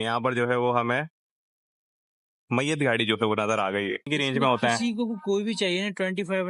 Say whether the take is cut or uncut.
cut